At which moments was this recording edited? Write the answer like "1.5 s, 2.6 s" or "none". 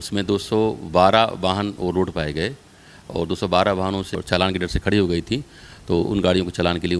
4.2 s